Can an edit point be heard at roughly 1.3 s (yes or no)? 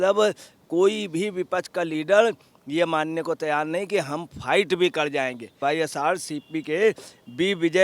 no